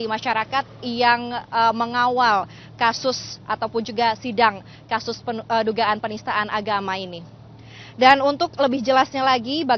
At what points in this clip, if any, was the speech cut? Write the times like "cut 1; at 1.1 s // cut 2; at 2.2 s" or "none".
cut 1; at 8.4 s